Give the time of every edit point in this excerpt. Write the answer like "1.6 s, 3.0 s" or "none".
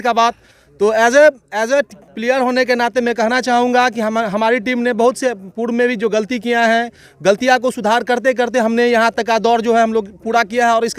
none